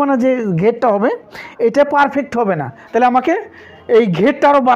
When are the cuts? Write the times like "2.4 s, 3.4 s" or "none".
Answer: none